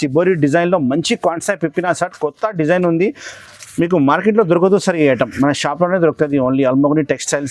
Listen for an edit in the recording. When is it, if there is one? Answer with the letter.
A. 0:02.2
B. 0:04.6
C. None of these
C